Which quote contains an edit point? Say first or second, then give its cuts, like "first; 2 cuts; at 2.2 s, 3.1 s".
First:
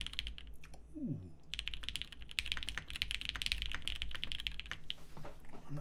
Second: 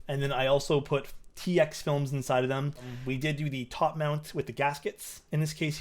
second; 1 cut; at 3.0 s